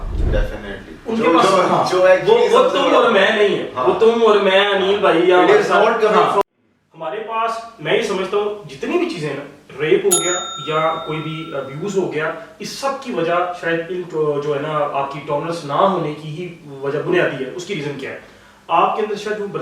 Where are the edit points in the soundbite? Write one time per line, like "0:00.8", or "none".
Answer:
0:06.4